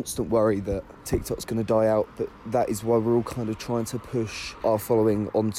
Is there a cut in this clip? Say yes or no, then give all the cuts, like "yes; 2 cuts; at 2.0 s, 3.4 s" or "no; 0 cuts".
yes; 2 cuts; at 0.9 s, 4.4 s